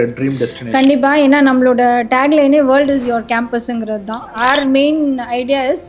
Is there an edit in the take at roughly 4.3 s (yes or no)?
yes